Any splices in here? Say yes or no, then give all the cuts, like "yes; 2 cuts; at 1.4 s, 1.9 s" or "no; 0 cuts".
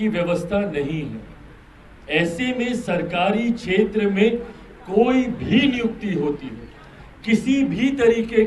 no; 0 cuts